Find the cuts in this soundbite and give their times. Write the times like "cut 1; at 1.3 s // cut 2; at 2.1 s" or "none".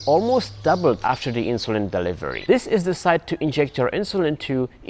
cut 1; at 1.0 s // cut 2; at 2.4 s